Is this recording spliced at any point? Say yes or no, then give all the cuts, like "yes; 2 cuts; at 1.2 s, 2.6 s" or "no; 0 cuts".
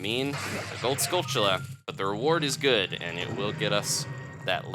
yes; 1 cut; at 1.9 s